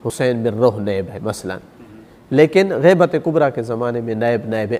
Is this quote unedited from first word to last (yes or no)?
yes